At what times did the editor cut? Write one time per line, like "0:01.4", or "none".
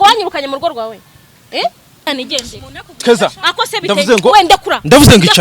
0:02.0